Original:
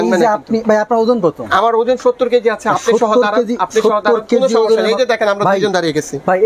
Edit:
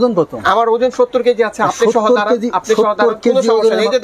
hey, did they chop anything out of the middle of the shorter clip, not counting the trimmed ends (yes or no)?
no